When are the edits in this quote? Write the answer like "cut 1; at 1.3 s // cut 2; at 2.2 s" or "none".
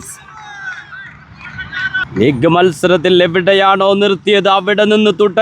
cut 1; at 2.1 s